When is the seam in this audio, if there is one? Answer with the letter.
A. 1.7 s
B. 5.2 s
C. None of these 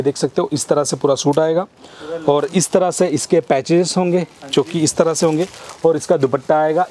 C